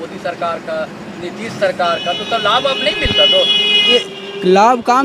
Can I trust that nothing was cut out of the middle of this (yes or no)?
no